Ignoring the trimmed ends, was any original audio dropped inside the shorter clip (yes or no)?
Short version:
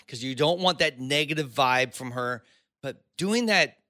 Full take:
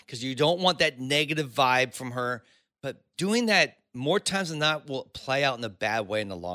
no